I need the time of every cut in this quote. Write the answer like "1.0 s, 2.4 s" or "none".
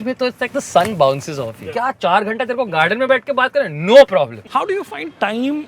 1.6 s, 4.4 s